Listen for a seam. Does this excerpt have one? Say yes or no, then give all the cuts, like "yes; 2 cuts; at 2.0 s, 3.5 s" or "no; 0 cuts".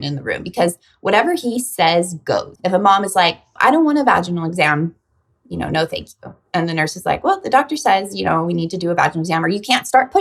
yes; 2 cuts; at 2.5 s, 3.5 s